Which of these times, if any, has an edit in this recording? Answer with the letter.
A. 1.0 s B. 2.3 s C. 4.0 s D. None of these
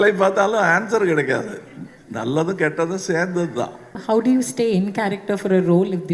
C